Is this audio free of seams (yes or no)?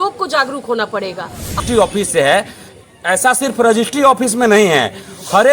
no